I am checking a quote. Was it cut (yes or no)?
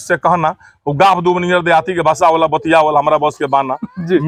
no